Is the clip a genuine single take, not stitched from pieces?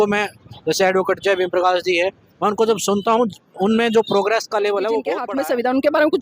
no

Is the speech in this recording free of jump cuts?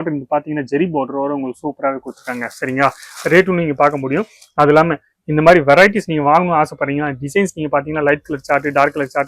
yes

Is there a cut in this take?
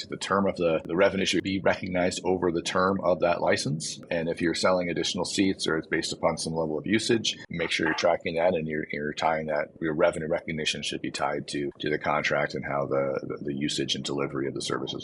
yes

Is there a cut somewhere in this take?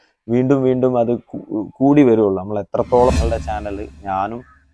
yes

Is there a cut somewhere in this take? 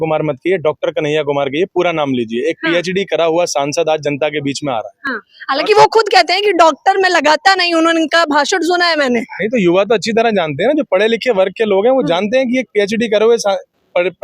no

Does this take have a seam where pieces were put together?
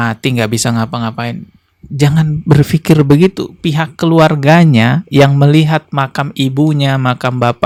no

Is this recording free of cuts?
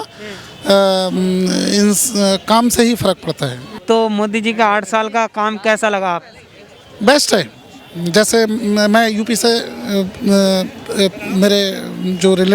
no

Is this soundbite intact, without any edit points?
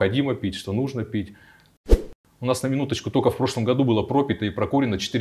no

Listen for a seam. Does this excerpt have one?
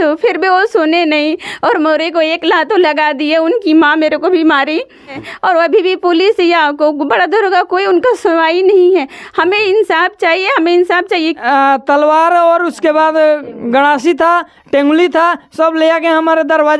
yes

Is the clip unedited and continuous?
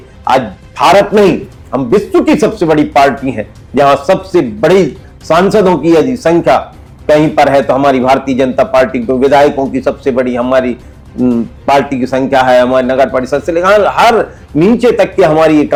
yes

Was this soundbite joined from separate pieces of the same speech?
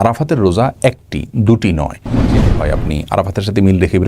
yes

